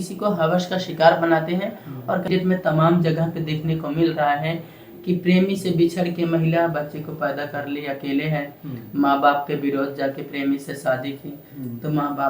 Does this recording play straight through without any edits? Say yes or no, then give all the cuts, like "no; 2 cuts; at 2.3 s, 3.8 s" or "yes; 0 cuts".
no; 1 cut; at 2.3 s